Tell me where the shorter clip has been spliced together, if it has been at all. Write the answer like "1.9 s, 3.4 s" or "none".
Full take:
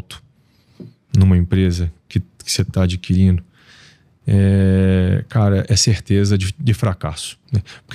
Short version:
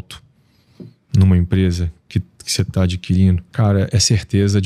3.5 s